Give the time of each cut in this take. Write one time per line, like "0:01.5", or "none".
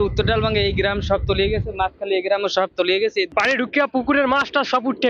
none